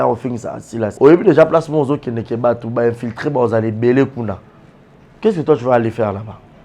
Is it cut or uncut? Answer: cut